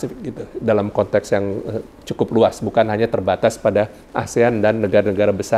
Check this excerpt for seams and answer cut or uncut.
uncut